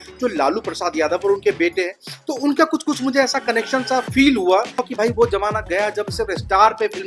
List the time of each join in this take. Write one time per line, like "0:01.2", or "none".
0:04.8